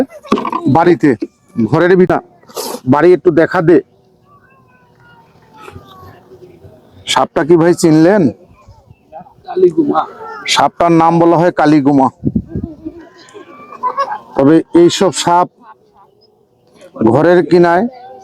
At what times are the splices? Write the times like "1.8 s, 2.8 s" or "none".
2.1 s